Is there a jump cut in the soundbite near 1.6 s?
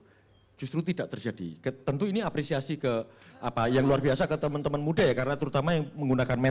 no; 0 cuts

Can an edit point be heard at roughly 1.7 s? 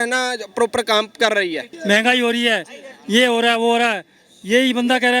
yes; 1 cut; at 1.7 s

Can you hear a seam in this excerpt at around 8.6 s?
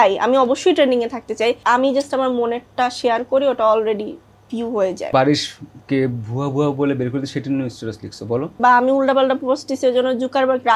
yes; 3 cuts; at 1.6 s, 5.0 s, 8.6 s

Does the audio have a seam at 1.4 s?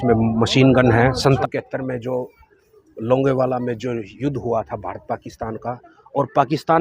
yes; 2 cuts; at 1.4 s, 4.1 s

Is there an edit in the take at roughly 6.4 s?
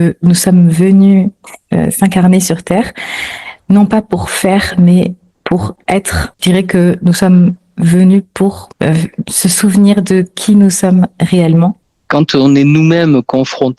yes; 3 cuts; at 6.4 s, 8.7 s, 11.9 s

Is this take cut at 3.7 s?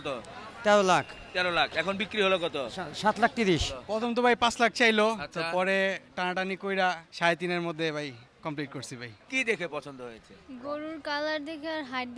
yes; 4 cuts; at 2.9 s, 3.7 s, 7.1 s, 9.2 s

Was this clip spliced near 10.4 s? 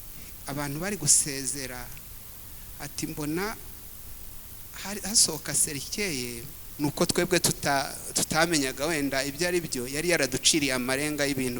no; 1 cut; at 6.6 s

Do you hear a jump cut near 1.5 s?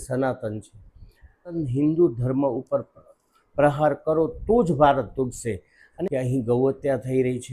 yes; 2 cuts; at 1.5 s, 5.8 s

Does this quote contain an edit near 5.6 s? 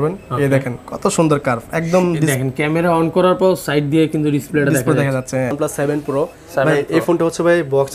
yes; 1 cut; at 5.6 s

